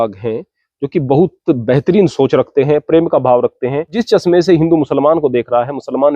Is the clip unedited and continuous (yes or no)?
no